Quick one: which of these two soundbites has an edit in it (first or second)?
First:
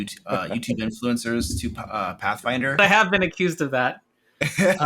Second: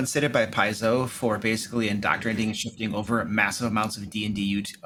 first